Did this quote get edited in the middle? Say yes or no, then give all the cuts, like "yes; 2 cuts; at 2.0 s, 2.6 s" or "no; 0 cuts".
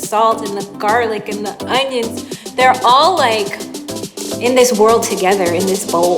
no; 0 cuts